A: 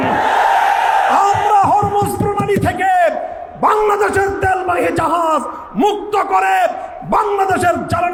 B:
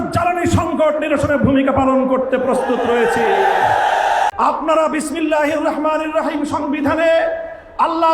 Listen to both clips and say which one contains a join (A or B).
B